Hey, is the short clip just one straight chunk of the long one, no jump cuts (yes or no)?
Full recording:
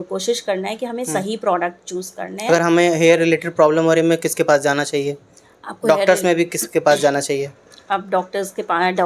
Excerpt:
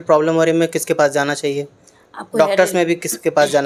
yes